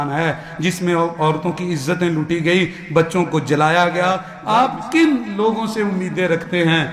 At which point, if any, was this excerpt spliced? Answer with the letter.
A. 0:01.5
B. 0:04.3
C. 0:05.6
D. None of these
B